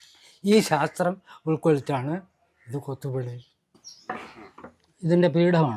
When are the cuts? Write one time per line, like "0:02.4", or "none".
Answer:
0:03.9